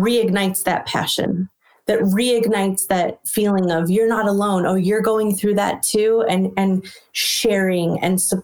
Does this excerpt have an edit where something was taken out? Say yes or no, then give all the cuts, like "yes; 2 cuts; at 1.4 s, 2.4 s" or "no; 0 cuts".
no; 0 cuts